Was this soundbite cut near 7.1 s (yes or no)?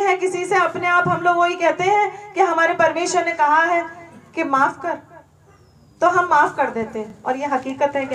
no